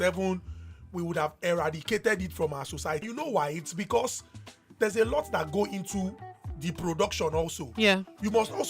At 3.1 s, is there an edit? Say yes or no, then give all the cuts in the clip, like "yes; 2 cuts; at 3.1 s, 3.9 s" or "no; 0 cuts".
yes; 1 cut; at 3.1 s